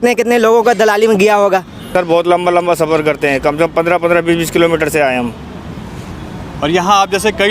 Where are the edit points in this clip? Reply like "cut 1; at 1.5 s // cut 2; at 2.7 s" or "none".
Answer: cut 1; at 1.9 s